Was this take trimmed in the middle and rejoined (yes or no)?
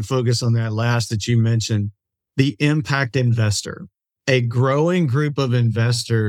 no